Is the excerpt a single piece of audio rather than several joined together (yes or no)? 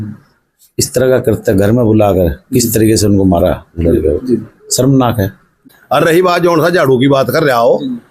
no